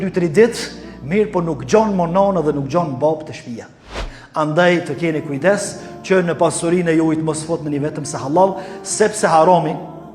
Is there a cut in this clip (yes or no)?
yes